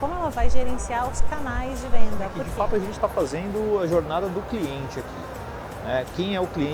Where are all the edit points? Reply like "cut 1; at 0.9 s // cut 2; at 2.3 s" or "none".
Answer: cut 1; at 2.4 s